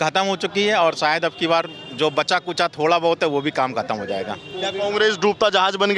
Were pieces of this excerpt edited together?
no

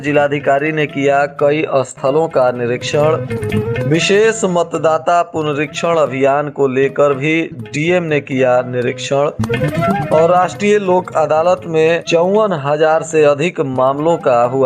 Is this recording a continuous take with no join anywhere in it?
yes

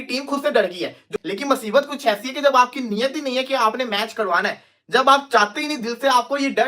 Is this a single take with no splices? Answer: no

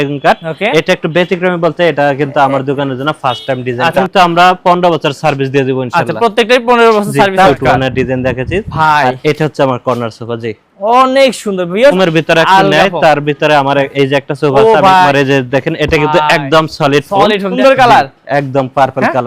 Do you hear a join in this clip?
yes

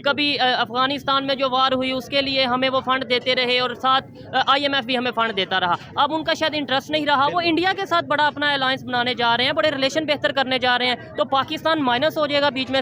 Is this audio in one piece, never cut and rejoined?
yes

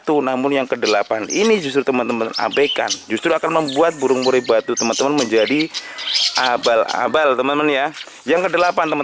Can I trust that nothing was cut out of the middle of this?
yes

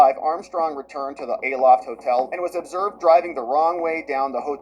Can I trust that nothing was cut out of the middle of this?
yes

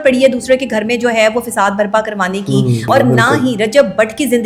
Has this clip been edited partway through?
yes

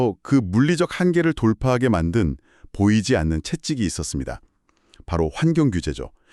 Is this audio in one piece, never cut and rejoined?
yes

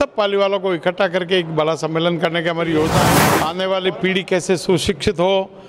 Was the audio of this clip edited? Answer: yes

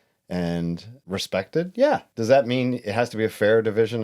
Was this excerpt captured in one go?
no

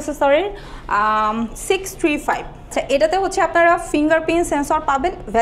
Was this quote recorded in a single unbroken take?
yes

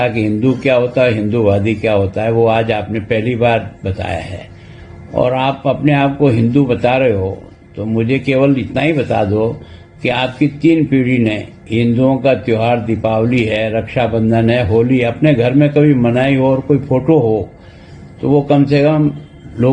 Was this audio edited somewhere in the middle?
no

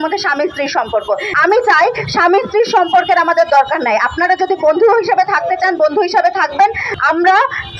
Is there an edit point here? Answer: yes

